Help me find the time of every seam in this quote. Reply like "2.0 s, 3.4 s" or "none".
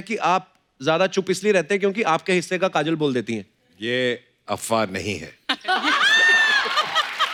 none